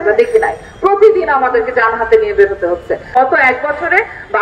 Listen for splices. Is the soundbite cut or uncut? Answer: cut